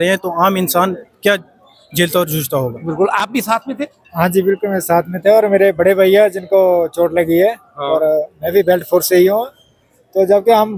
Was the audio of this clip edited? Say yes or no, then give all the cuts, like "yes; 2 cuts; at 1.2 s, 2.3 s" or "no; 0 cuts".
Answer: no; 0 cuts